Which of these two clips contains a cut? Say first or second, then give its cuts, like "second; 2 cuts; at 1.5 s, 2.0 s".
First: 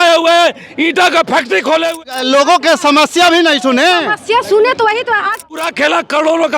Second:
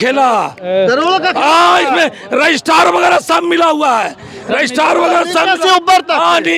first; 2 cuts; at 2.0 s, 5.7 s